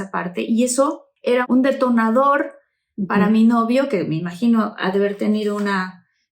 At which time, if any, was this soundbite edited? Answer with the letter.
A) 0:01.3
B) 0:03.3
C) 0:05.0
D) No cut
A